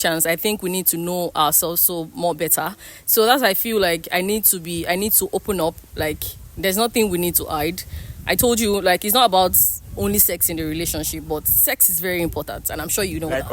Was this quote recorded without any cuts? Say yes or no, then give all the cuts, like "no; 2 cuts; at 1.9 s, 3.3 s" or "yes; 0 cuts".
yes; 0 cuts